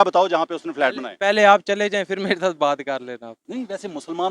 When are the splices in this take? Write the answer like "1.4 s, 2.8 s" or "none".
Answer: 3.4 s